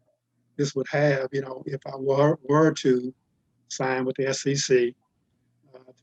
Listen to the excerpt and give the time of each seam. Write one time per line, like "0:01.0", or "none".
none